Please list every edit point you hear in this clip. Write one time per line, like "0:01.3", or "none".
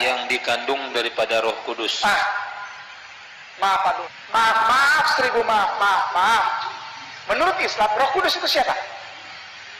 0:04.1